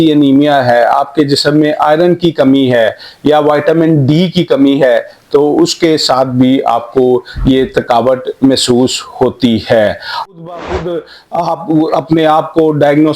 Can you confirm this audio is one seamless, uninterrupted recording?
no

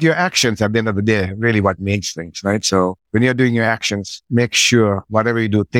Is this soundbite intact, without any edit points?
no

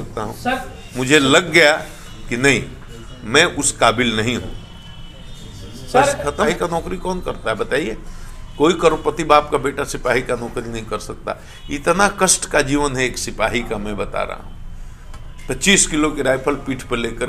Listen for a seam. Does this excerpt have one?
yes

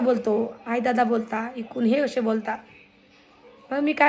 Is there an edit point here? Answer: no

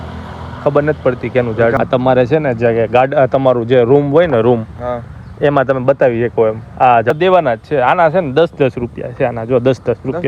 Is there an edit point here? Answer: yes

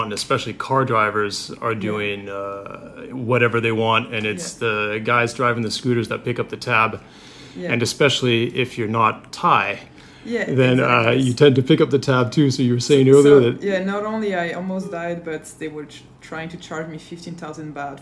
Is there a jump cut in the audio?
yes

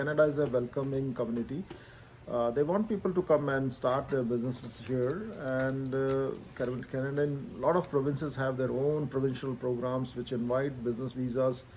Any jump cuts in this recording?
no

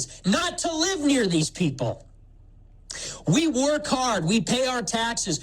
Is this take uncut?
yes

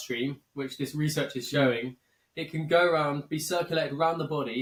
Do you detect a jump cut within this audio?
no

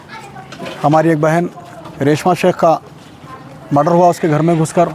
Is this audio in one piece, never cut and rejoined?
yes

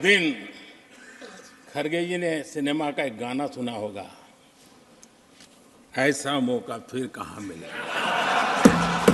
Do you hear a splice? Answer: no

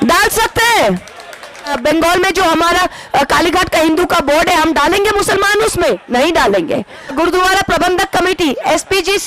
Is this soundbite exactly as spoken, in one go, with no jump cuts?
no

